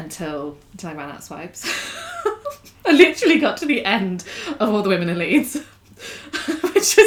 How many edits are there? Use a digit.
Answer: 0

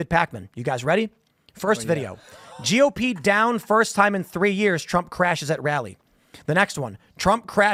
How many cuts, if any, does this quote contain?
0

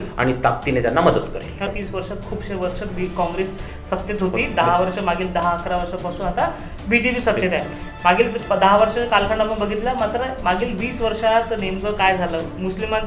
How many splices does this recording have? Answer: 1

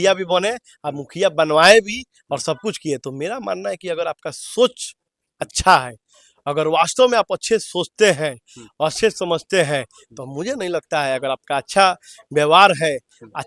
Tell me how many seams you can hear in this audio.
0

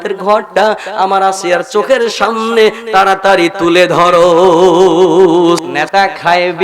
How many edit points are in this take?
1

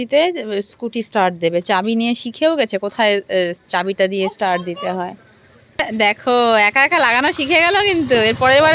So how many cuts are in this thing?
1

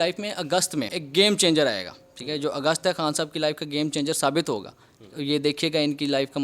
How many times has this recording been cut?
1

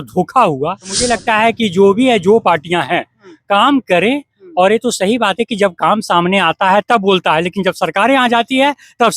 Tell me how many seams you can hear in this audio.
1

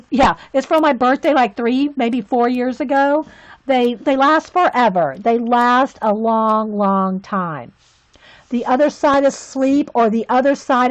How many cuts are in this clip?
1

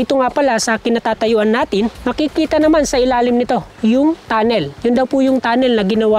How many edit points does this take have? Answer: 2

